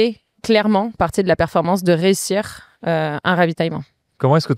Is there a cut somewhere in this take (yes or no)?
no